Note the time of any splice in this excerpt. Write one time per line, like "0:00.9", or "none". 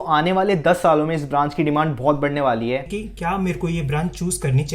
0:02.9